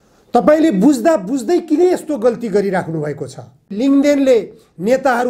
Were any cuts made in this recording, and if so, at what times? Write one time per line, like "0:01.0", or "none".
0:03.7